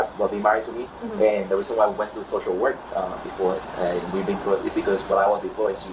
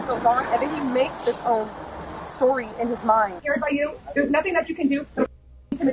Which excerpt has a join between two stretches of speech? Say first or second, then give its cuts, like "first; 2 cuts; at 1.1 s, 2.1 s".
second; 1 cut; at 3.4 s